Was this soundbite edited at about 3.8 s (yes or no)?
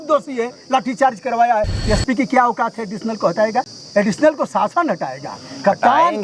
yes